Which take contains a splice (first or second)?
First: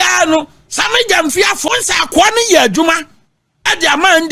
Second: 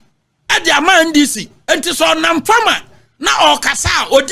first